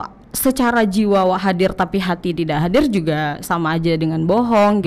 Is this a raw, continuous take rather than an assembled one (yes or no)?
yes